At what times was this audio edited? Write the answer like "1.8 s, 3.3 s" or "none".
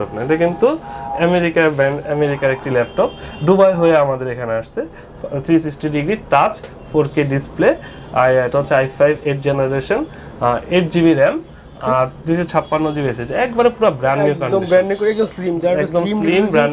none